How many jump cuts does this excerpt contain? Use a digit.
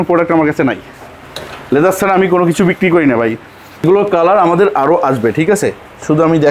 1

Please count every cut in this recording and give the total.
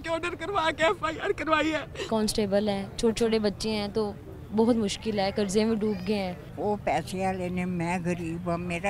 2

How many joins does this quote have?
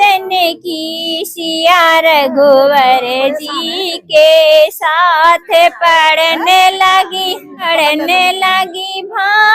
1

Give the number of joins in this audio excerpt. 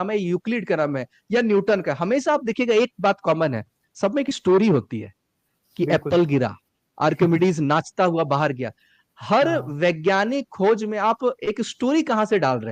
0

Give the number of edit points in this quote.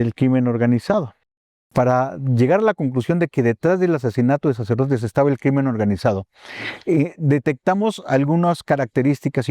1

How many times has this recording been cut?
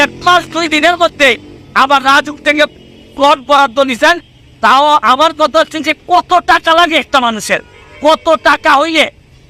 0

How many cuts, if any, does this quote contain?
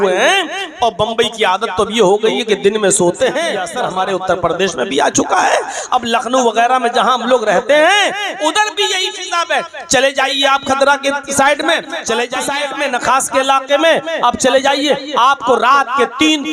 2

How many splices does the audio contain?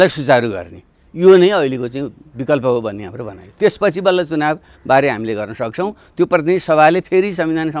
0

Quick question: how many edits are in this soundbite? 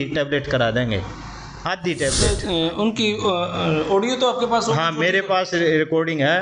1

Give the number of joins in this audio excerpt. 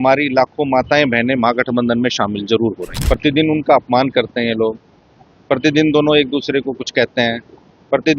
1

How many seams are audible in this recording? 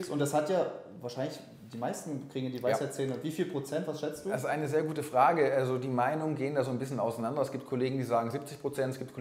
0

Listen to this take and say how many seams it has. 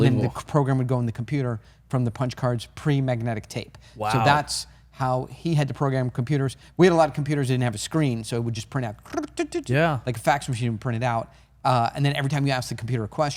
0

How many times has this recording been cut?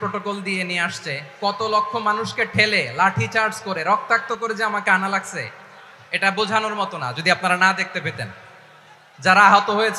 0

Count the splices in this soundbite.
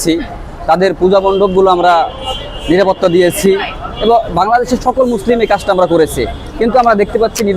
0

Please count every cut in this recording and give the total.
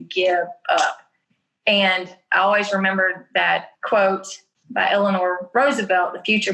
1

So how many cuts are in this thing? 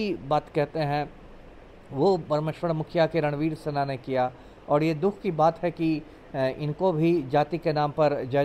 0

